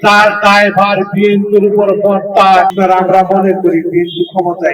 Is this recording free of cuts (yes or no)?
no